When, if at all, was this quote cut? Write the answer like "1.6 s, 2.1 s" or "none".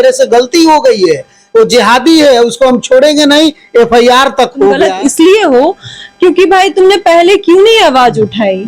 4.8 s